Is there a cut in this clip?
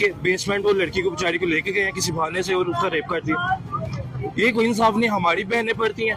no; 0 cuts

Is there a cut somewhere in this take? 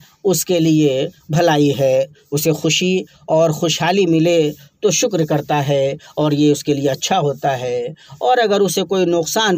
no; 0 cuts

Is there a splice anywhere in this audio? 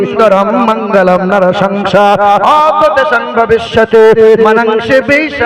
no; 0 cuts

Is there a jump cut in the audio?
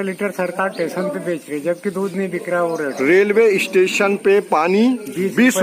no; 0 cuts

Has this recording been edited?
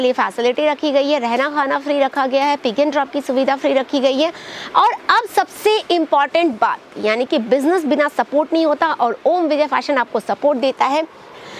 no; 0 cuts

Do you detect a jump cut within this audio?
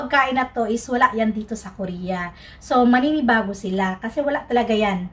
no; 0 cuts

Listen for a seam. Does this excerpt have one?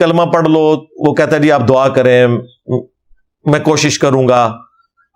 no; 0 cuts

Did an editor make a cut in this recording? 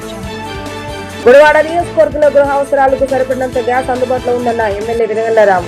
no; 0 cuts

